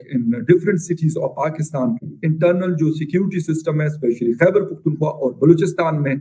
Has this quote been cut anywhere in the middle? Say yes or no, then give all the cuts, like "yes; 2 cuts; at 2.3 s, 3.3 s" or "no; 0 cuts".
yes; 1 cut; at 2.1 s